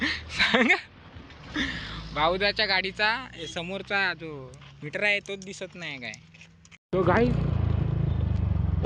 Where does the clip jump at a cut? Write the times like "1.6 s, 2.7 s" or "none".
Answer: 6.8 s